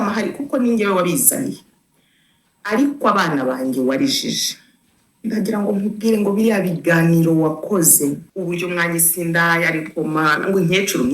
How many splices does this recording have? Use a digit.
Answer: 1